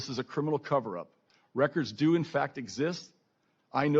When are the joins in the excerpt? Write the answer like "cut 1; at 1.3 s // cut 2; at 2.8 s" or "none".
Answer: none

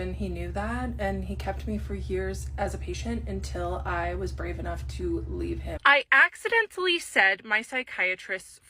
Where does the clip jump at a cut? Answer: cut 1; at 5.7 s

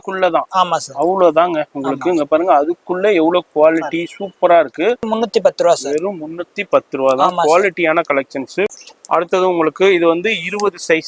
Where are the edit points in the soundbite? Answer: cut 1; at 5.1 s // cut 2; at 8.7 s

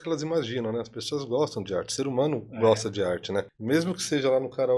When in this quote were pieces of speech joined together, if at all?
cut 1; at 3.5 s

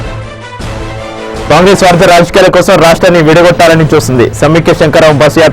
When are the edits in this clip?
cut 1; at 0.9 s

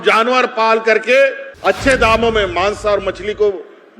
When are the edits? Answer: cut 1; at 1.5 s

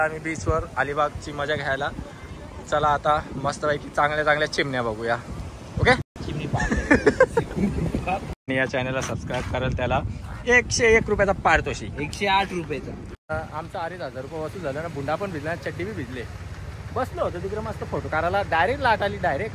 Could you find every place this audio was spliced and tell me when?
cut 1; at 8.5 s // cut 2; at 13.2 s

